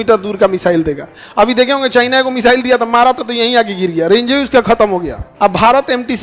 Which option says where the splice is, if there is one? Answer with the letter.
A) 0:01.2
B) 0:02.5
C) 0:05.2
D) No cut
C